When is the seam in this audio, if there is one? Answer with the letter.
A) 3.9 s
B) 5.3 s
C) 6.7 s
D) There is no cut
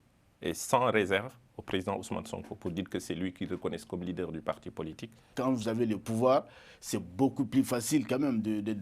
B